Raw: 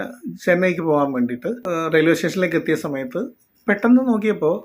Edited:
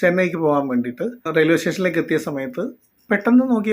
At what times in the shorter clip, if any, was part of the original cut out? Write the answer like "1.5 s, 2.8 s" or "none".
1.2 s